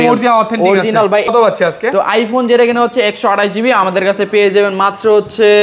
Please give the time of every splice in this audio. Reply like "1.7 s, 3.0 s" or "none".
1.3 s